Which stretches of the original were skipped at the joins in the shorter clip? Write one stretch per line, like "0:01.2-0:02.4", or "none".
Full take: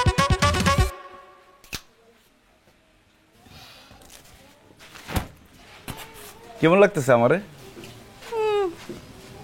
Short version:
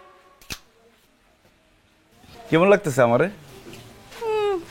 0:03.5-0:06.4